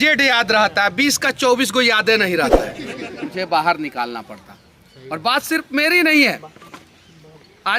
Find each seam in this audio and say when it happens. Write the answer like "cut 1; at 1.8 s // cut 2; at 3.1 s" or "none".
cut 1; at 3.0 s